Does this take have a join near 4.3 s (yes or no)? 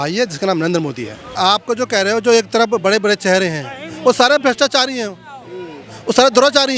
no